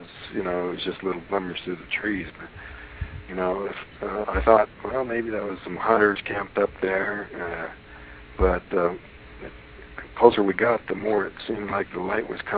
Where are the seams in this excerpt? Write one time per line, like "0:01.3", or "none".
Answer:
none

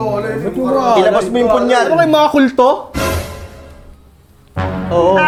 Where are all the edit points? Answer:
none

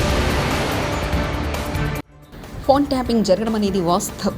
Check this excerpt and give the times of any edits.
0:02.1

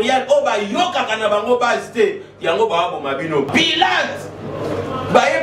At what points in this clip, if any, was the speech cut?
0:03.5

